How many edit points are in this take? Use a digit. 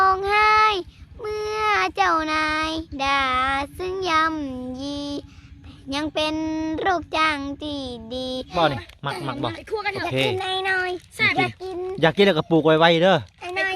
1